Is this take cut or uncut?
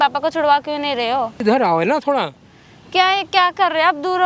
cut